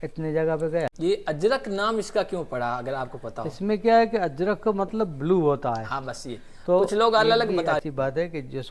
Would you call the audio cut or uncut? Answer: cut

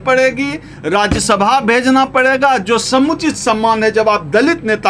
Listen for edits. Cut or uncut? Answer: uncut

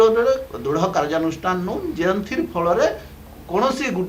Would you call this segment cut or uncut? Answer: uncut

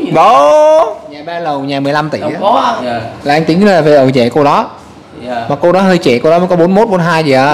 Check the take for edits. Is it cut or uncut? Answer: cut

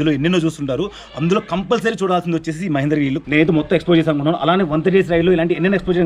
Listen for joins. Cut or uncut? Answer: cut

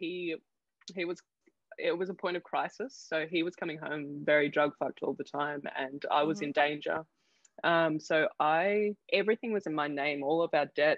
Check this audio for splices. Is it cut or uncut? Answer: uncut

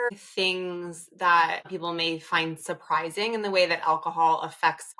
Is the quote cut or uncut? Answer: cut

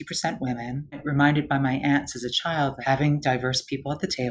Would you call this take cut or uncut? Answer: cut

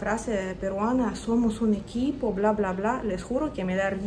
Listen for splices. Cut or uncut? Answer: uncut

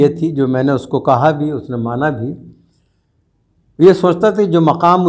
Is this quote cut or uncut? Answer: uncut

